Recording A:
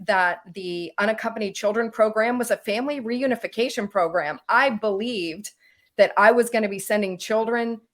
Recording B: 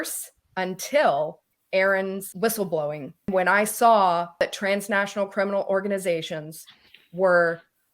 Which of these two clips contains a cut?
B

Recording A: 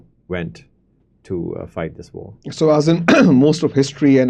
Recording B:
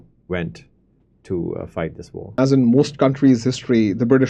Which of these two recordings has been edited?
B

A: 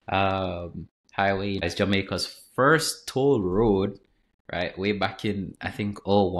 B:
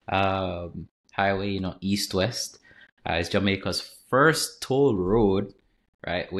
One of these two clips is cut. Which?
A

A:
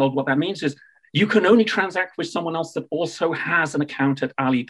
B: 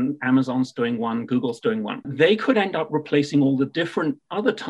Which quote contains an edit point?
B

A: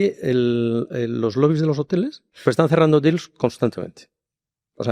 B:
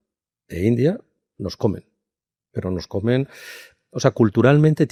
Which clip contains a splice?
A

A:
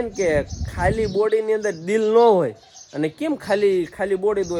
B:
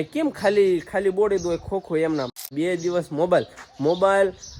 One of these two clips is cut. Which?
B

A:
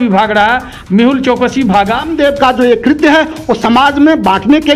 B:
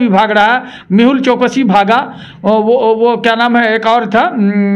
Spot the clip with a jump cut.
A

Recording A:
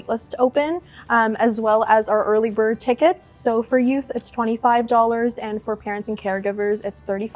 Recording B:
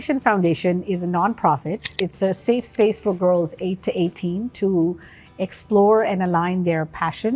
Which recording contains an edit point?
B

